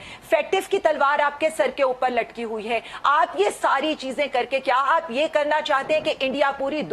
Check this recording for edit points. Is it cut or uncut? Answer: uncut